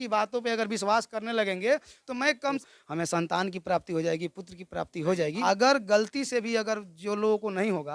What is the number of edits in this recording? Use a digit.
2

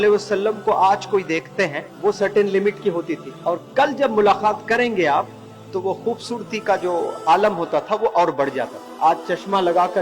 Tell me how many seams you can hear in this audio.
3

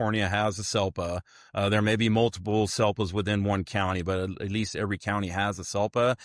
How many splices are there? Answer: 0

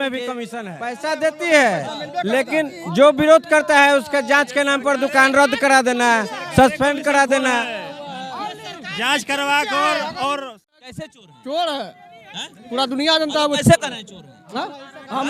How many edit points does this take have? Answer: 2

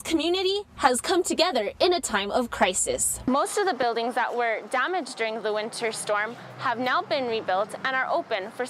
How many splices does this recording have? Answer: 1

